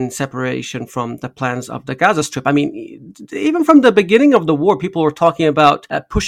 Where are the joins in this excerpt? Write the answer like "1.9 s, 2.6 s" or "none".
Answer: none